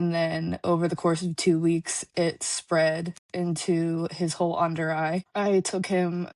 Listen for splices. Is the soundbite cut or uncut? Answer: uncut